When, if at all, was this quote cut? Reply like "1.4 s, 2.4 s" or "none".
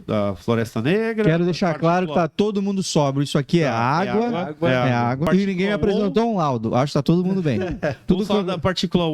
5.3 s